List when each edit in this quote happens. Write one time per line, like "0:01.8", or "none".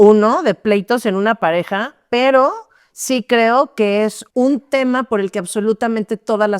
0:04.2